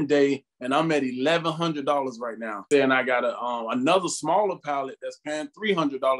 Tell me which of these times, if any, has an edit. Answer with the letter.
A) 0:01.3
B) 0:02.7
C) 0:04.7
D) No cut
B